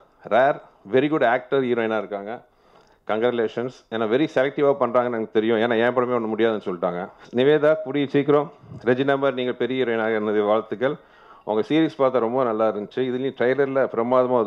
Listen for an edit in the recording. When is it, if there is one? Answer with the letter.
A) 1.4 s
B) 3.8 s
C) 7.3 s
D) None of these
C